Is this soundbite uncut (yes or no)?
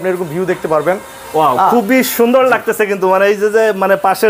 yes